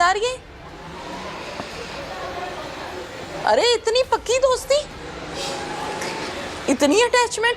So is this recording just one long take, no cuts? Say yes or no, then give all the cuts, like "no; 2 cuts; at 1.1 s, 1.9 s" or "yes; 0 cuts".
yes; 0 cuts